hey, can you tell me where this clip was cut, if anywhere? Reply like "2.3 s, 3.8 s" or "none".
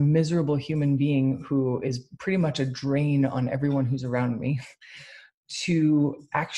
none